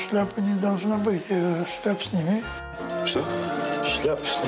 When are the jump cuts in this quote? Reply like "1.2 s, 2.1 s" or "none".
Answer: 2.7 s